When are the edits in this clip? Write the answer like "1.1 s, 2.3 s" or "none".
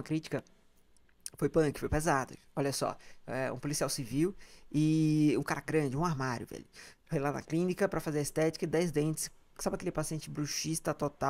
none

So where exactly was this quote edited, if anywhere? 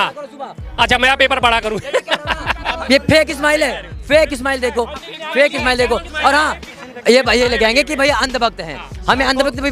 2.7 s, 6.7 s

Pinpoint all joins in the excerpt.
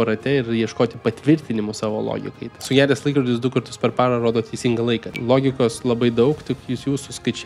2.6 s, 5.1 s

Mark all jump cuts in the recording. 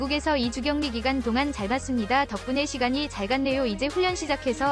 none

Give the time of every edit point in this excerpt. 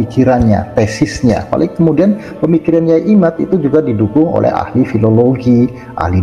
1.5 s

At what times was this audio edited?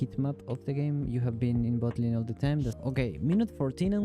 2.8 s

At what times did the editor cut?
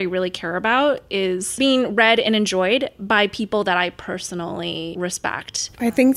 1.6 s, 5.1 s

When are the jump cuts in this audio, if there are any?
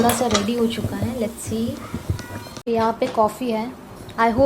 2.6 s

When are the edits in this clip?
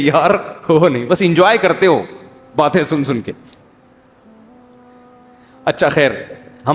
none

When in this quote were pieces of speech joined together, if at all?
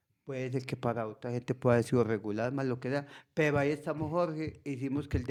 none

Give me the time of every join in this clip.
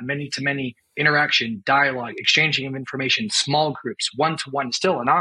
none

